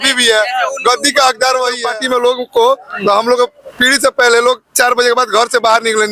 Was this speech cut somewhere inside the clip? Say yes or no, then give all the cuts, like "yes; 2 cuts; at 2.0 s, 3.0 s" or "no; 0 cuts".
yes; 1 cut; at 1.8 s